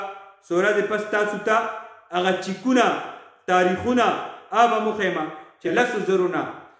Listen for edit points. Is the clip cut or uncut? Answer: cut